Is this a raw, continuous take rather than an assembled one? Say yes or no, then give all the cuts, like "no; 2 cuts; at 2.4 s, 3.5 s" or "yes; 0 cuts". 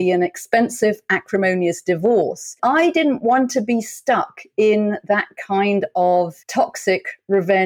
no; 2 cuts; at 2.6 s, 6.4 s